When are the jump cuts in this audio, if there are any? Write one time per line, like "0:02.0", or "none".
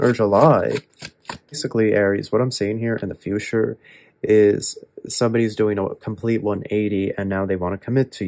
0:01.6